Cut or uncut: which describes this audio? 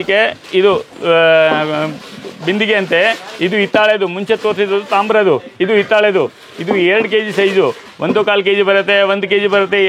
uncut